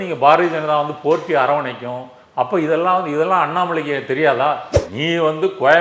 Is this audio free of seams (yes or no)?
no